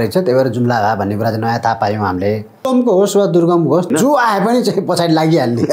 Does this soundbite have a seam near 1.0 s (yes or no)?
no